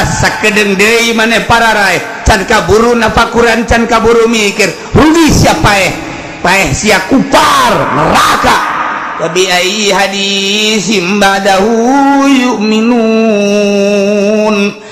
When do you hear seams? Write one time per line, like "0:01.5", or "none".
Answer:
none